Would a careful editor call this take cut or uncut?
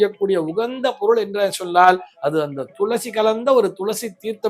uncut